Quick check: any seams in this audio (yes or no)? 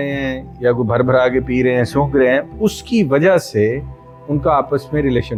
no